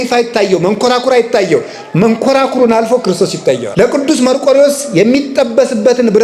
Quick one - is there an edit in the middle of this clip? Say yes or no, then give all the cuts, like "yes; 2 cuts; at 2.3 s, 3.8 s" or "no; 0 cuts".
yes; 1 cut; at 3.7 s